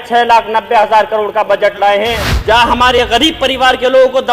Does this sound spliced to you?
yes; 1 cut; at 2.3 s

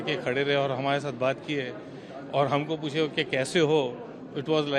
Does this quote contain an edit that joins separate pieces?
no; 0 cuts

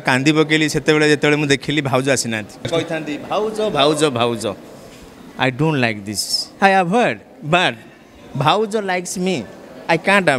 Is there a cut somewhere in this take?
yes; 1 cut; at 2.7 s

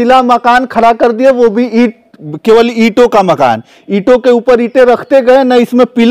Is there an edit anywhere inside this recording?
no; 0 cuts

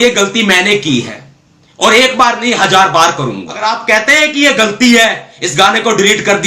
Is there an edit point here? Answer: yes; 1 cut; at 3.6 s

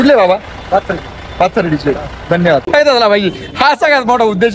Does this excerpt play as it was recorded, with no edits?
no; 1 cut; at 2.6 s

